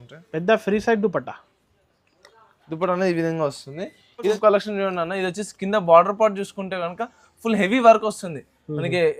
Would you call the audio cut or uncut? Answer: cut